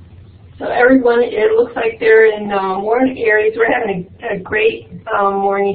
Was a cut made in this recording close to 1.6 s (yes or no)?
no